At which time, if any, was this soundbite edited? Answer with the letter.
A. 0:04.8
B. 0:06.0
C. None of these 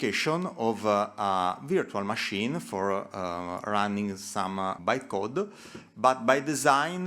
A